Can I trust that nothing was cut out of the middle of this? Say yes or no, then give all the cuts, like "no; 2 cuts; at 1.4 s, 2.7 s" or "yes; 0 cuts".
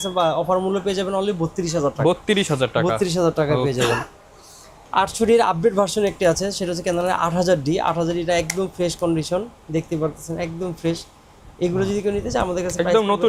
yes; 0 cuts